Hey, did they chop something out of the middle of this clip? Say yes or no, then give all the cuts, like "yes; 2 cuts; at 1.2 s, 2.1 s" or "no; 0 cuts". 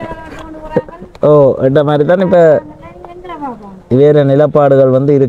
no; 0 cuts